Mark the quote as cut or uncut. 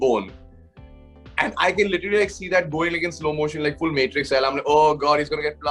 uncut